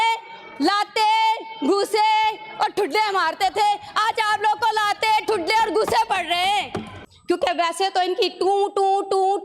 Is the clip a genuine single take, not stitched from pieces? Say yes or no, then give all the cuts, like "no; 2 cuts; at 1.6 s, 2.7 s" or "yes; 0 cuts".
no; 1 cut; at 7.3 s